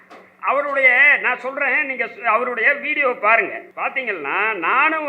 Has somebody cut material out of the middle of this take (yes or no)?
yes